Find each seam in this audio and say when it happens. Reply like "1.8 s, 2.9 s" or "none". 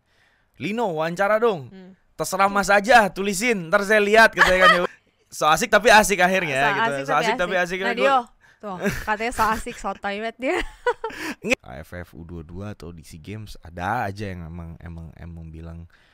4.9 s, 11.5 s